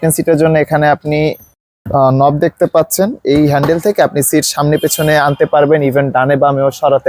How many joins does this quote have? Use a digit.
0